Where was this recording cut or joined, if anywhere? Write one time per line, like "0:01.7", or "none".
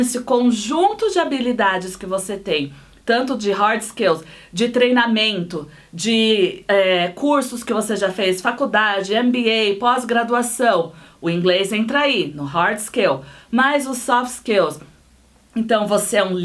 none